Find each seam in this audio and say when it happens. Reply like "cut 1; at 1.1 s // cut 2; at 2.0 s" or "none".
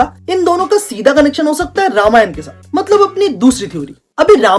none

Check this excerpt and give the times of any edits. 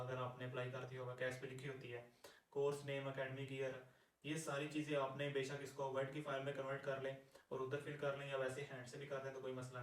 none

